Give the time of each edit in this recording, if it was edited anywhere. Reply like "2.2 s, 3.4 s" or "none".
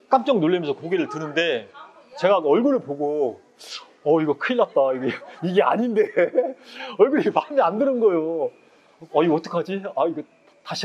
none